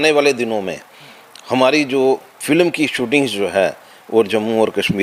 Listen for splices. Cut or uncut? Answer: uncut